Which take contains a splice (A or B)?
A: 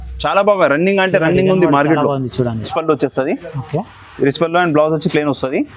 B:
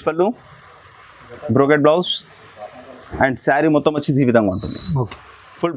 A